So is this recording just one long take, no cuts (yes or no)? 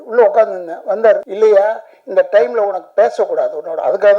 no